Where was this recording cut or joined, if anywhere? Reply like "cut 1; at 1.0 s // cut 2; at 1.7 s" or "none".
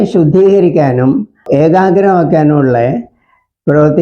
cut 1; at 1.4 s